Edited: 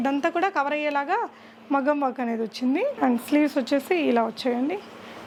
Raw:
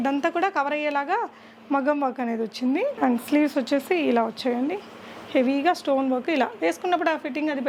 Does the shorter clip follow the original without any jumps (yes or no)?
yes